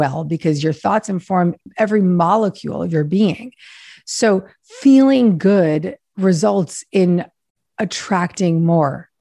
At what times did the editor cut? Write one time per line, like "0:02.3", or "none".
0:01.7